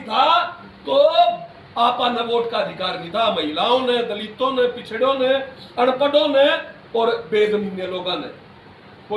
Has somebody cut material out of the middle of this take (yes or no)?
no